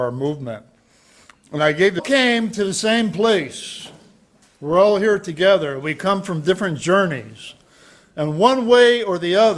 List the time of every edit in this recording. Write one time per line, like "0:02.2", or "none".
none